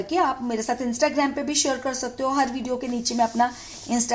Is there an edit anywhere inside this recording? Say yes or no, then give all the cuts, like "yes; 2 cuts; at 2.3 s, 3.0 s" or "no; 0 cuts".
no; 0 cuts